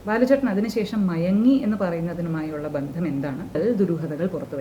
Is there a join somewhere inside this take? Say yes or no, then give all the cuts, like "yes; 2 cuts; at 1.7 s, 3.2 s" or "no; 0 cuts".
yes; 1 cut; at 3.6 s